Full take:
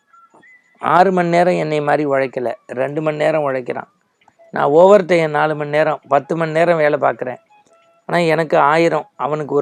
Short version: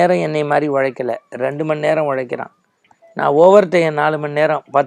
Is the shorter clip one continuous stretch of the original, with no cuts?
yes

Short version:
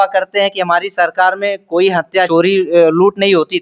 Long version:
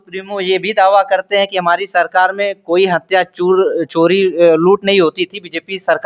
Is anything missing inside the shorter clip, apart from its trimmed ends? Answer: yes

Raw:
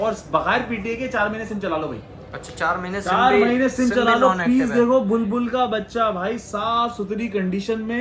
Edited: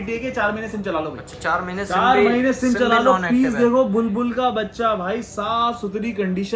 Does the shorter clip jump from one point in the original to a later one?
yes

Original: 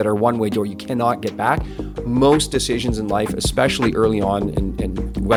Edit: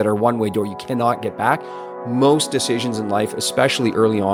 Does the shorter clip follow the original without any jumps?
yes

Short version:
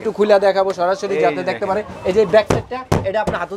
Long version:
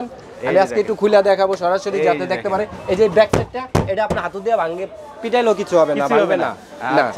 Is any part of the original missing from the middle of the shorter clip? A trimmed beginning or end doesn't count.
no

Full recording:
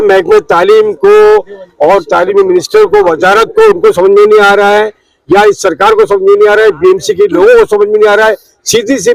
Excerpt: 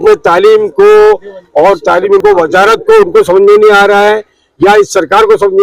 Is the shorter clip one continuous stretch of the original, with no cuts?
no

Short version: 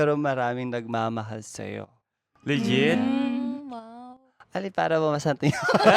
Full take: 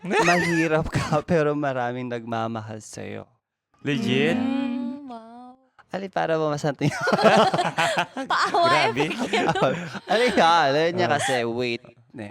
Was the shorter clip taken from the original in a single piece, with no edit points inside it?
yes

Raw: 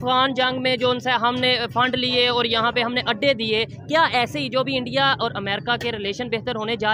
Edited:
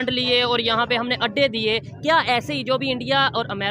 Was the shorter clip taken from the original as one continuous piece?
yes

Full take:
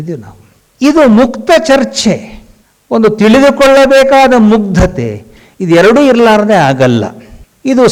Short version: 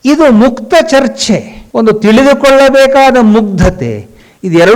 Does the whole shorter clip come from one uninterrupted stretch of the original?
no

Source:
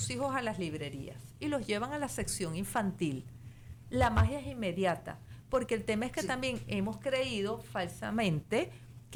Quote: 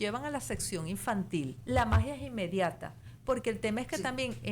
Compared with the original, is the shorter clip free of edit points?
no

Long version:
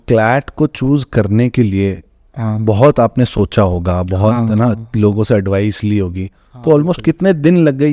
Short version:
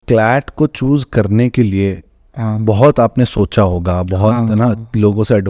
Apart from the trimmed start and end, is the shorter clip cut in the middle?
no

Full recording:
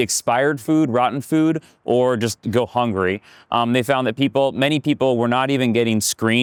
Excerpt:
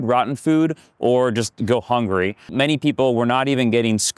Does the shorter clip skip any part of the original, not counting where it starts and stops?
yes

